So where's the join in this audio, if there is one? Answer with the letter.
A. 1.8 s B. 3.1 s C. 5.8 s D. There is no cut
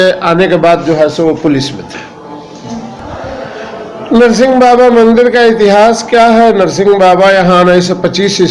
B